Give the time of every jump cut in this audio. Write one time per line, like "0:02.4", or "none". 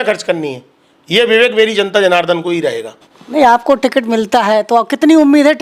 0:03.1